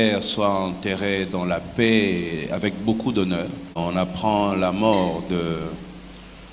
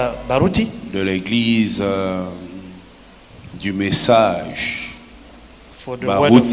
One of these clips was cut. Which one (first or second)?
first